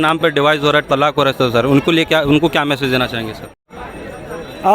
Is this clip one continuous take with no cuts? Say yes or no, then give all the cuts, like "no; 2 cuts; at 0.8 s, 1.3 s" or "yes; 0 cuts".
no; 1 cut; at 3.7 s